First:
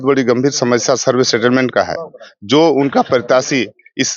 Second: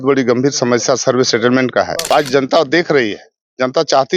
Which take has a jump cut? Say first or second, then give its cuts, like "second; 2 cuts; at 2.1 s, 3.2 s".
second; 1 cut; at 2.0 s